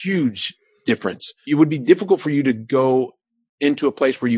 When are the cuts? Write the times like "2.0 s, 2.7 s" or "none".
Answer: 1.4 s